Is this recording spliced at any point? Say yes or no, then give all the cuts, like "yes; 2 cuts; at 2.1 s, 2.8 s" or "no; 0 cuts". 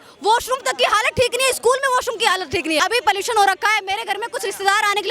yes; 1 cut; at 2.8 s